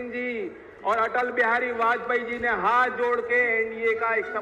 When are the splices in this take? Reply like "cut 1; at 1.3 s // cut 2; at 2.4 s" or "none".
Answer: none